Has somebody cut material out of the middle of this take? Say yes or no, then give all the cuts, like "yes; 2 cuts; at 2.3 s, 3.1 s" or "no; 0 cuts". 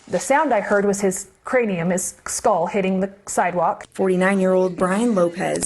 no; 0 cuts